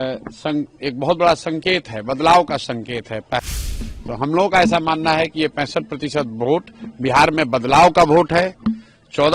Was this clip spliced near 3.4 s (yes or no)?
yes